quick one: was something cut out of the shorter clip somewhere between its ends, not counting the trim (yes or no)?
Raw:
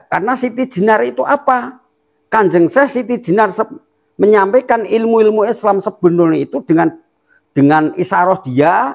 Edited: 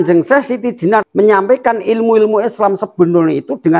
yes